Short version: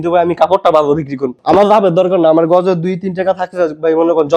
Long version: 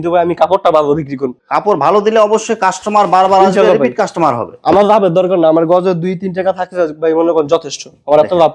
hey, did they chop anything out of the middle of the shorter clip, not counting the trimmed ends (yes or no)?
yes